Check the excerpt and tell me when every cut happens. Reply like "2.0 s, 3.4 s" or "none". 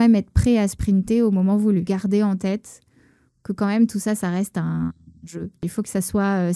1.9 s, 5.7 s